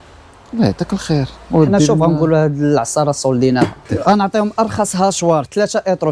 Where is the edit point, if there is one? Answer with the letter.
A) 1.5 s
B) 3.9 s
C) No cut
B